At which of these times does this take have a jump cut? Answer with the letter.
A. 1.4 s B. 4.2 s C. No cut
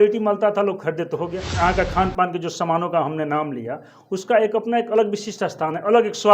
A